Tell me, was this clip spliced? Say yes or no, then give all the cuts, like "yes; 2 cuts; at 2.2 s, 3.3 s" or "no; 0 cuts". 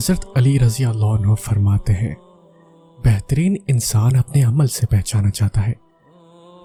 no; 0 cuts